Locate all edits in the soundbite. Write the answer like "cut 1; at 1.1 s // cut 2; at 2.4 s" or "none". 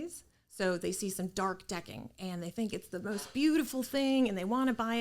none